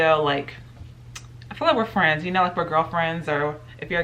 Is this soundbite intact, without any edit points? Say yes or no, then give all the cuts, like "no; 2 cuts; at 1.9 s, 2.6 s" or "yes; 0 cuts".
yes; 0 cuts